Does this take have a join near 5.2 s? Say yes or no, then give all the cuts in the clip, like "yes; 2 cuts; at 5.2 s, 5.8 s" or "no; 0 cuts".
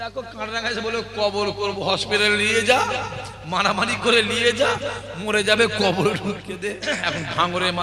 no; 1 cut; at 6.5 s